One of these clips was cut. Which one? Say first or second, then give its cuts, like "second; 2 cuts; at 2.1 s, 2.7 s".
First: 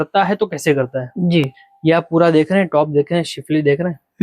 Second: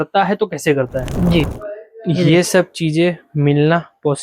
second; 1 cut; at 1.6 s